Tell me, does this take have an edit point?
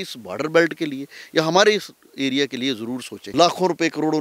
yes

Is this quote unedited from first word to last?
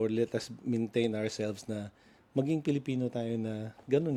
yes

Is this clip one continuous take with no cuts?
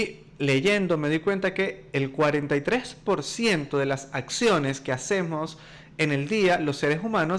yes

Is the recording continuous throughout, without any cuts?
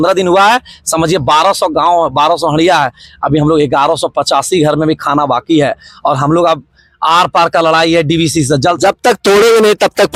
yes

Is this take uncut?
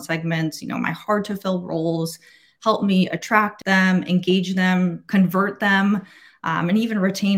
no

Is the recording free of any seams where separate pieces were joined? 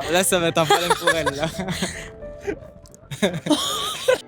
yes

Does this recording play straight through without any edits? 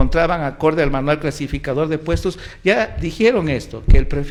yes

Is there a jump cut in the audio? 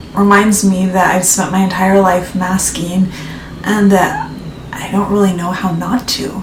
no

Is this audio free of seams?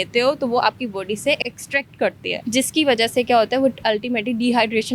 no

